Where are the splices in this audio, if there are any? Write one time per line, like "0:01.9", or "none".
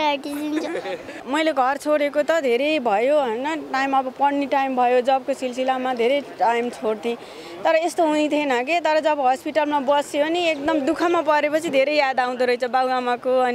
0:01.2